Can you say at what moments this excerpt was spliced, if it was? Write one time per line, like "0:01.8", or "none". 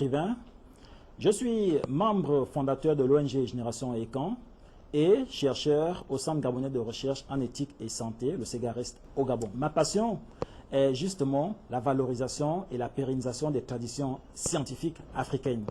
0:09.5